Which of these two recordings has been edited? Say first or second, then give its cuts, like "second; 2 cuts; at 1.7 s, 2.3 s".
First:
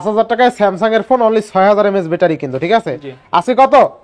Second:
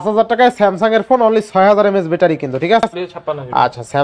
second; 1 cut; at 3.1 s